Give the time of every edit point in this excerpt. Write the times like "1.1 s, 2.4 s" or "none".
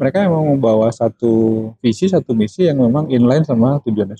none